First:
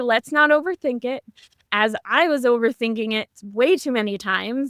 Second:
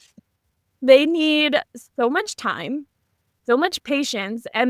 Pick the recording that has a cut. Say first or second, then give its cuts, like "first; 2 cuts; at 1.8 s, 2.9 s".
second; 1 cut; at 3.8 s